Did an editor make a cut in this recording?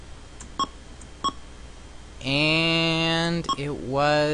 yes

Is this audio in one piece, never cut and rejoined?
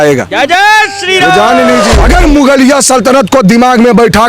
no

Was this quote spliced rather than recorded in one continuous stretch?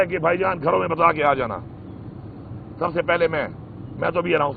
no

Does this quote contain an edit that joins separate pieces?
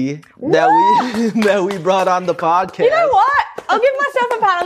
no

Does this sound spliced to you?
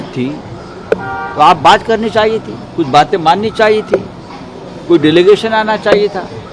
no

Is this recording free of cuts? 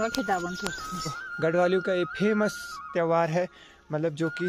no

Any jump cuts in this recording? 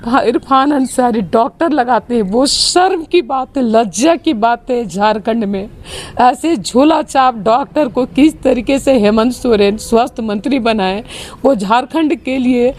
no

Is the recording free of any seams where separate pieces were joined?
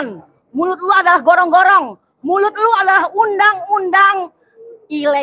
yes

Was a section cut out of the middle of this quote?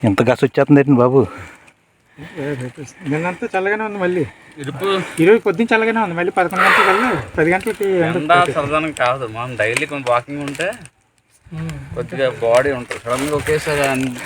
no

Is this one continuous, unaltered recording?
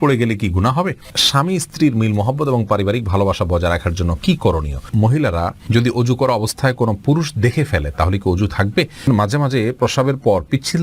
no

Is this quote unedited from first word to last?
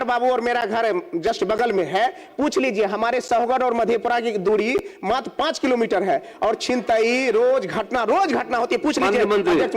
yes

